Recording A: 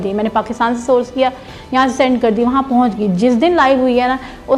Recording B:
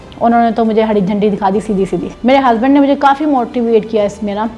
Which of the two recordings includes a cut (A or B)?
B